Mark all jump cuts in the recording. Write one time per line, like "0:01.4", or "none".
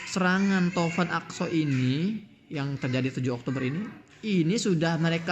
none